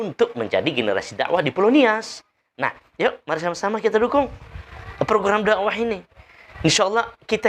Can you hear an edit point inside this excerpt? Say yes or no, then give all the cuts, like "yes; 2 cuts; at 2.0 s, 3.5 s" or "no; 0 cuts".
no; 0 cuts